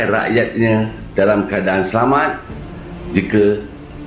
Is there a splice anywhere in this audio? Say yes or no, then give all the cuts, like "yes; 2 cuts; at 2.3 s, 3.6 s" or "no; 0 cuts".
no; 0 cuts